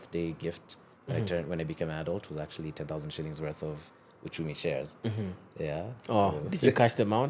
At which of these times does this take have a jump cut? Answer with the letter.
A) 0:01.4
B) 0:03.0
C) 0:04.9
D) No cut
D